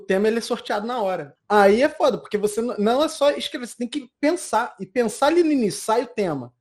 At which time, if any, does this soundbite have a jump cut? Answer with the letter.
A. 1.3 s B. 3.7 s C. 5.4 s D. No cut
A